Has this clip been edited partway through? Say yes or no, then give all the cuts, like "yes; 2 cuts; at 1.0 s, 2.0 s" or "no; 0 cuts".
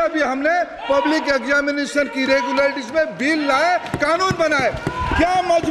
no; 0 cuts